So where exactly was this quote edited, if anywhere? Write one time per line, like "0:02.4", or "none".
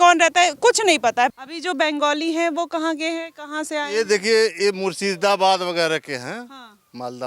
0:01.3